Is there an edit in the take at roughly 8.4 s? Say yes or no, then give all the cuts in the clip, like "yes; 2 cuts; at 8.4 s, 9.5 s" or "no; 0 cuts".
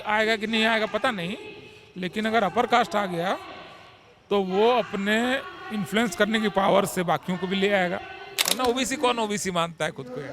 yes; 1 cut; at 8.4 s